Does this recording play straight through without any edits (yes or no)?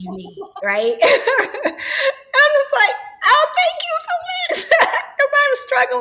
yes